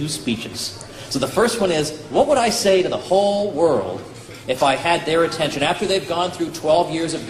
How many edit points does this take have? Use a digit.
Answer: 0